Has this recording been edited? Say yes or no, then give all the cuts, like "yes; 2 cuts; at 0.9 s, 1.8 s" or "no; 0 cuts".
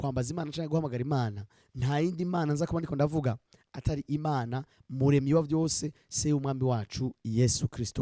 no; 0 cuts